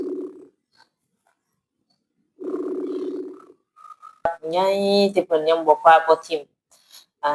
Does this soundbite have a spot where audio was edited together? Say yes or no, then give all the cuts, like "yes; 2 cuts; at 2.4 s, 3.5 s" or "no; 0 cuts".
yes; 1 cut; at 4.3 s